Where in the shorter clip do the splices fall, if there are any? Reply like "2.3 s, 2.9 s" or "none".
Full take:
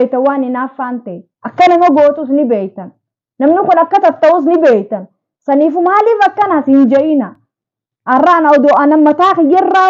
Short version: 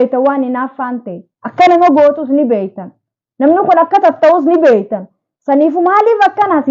none